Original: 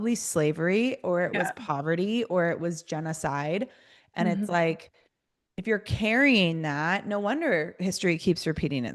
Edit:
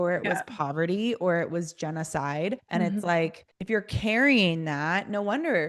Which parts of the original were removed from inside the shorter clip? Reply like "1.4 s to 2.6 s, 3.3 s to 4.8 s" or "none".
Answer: 3.7 s to 4.1 s, 4.9 s to 5.5 s